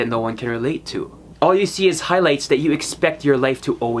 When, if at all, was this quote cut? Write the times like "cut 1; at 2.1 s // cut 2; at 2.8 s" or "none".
cut 1; at 1.2 s

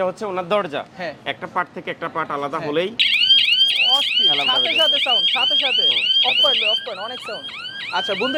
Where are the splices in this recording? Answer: none

